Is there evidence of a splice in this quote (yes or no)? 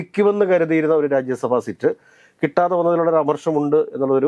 no